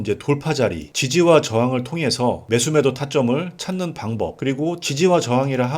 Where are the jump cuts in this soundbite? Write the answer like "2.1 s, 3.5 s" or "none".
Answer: 1.0 s, 2.4 s